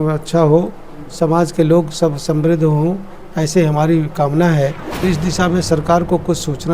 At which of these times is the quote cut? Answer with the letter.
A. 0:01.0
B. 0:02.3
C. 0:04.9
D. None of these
C